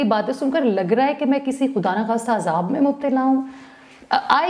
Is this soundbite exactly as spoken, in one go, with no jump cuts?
yes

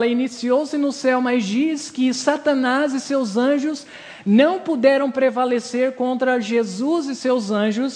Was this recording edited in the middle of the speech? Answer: no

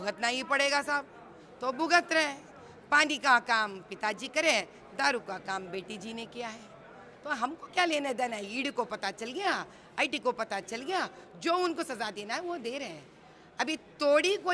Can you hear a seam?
no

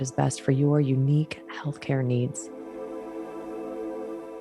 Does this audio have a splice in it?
yes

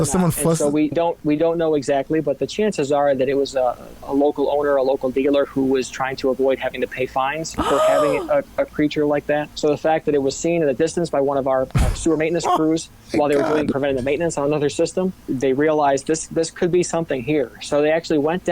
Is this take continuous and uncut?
no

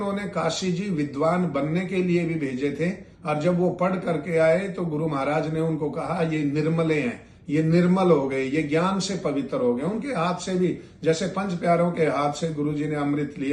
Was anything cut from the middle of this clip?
no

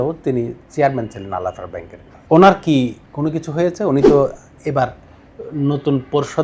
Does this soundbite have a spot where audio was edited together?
yes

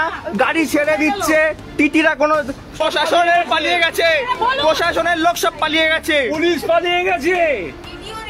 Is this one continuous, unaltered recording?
no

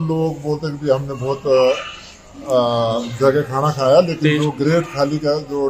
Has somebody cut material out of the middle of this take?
no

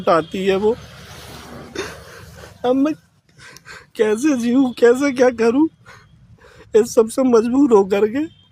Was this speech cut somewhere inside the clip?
no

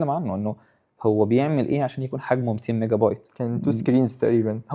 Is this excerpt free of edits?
yes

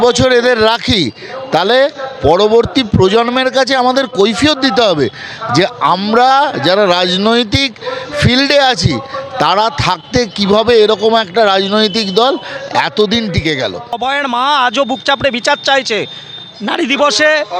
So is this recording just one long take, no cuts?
no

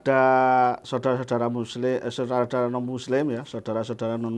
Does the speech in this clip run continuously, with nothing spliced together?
yes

